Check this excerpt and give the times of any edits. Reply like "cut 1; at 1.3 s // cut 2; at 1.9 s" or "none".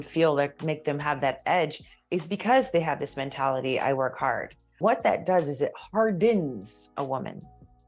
cut 1; at 4.8 s

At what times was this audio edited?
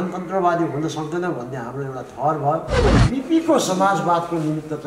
cut 1; at 2.8 s

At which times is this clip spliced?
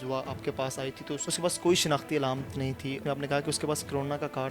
cut 1; at 1.2 s // cut 2; at 3.0 s

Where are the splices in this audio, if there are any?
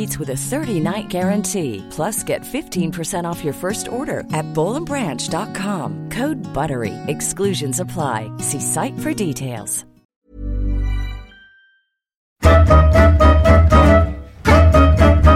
cut 1; at 10.0 s // cut 2; at 12.4 s

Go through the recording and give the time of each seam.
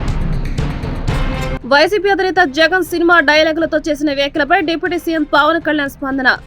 cut 1; at 0.9 s

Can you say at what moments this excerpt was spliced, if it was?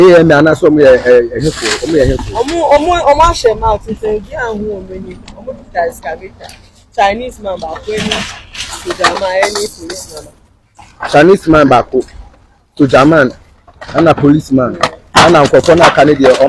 none

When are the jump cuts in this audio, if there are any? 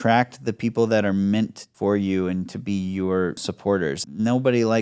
cut 1; at 1.6 s // cut 2; at 3.5 s

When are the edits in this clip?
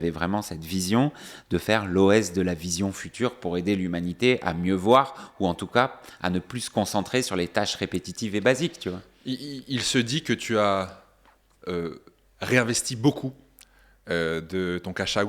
none

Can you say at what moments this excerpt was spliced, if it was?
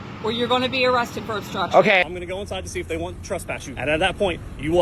cut 1; at 2.0 s // cut 2; at 3.7 s

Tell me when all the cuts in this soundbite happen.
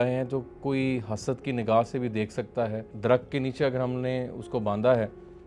cut 1; at 2.8 s

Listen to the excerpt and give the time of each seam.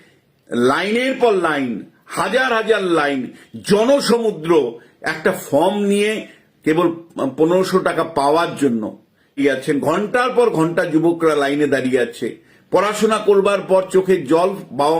cut 1; at 9.4 s

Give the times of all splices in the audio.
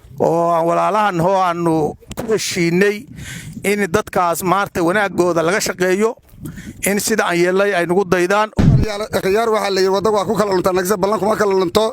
cut 1; at 8.6 s

